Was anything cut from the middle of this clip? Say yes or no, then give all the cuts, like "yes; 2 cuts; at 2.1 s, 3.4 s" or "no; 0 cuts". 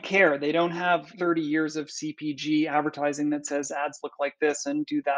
yes; 1 cut; at 1.1 s